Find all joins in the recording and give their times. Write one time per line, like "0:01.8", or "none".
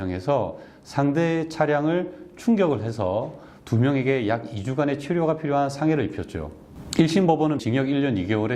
0:07.6